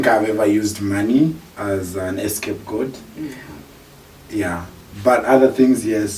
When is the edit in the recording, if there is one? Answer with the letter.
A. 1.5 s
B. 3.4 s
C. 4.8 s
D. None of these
D